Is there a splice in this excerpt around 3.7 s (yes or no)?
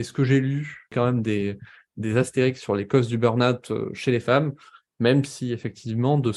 no